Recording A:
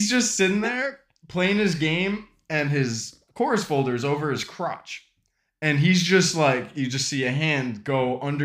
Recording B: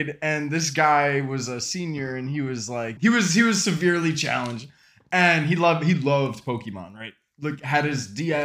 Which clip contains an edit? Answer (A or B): B